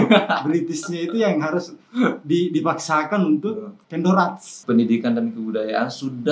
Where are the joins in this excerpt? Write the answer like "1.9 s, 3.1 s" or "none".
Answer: 4.6 s